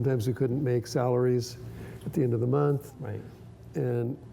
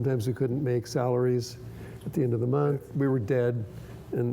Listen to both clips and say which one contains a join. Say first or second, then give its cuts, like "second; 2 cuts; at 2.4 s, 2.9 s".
second; 1 cut; at 2.9 s